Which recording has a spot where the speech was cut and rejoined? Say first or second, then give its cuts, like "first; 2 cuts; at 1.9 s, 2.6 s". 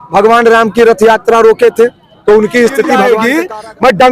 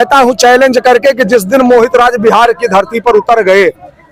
first; 1 cut; at 3.1 s